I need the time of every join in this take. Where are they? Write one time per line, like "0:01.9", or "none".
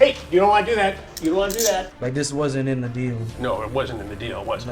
0:01.9
0:03.3

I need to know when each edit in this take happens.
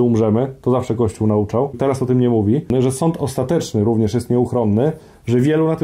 0:01.8
0:02.7

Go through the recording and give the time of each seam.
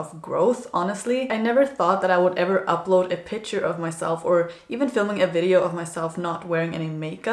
0:01.3

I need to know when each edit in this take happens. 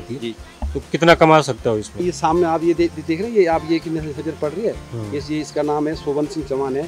0:02.0

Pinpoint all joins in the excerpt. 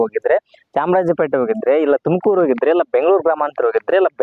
none

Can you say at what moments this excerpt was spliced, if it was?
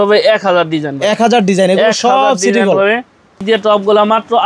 0:03.4

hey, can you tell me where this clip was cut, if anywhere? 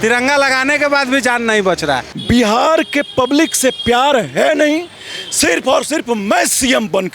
0:02.1

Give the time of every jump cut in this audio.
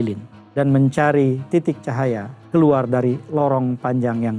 0:02.4

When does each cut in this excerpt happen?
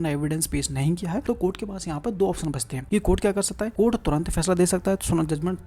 0:01.2
0:02.7
0:03.7

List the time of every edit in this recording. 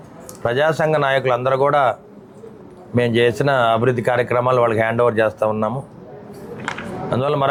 none

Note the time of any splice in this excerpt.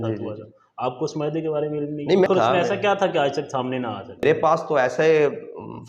0:02.3
0:04.2

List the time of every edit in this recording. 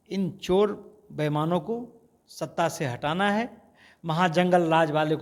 none

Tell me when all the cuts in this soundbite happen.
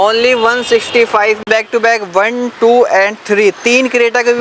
0:01.4

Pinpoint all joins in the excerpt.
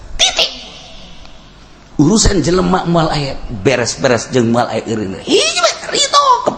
none

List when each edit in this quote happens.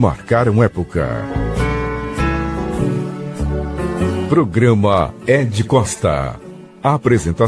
none

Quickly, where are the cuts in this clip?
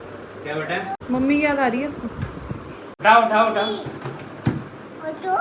0:01.0
0:02.9

